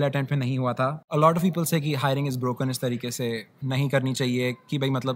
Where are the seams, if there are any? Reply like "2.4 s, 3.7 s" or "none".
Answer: 1.0 s